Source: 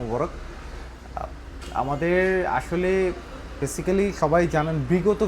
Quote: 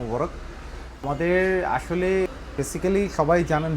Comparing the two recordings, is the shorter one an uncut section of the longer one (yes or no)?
no